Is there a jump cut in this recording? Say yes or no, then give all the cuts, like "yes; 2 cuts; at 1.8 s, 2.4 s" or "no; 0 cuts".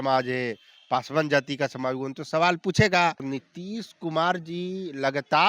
yes; 1 cut; at 3.3 s